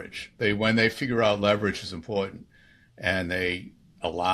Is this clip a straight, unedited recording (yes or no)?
yes